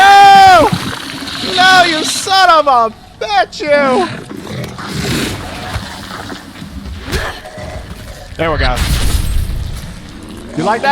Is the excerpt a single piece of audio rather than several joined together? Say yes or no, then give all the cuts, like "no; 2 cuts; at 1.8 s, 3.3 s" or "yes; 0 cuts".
no; 1 cut; at 4.3 s